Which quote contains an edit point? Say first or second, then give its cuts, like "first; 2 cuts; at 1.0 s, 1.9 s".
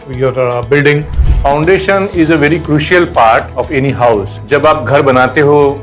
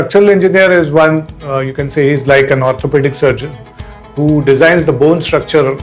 first; 3 cuts; at 1.2 s, 3.5 s, 4.3 s